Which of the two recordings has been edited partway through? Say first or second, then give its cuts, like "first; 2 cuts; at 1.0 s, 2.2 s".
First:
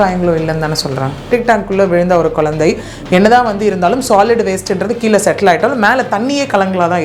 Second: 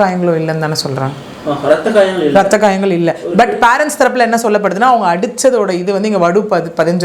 first; 1 cut; at 1.3 s